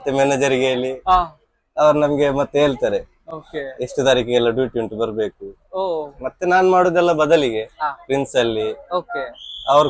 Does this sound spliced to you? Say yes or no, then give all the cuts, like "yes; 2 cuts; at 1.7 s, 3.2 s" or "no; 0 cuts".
no; 0 cuts